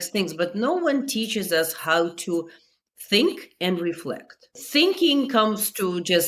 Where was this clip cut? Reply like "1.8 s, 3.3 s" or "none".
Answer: 4.6 s